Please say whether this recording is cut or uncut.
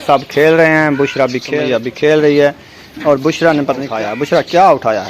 cut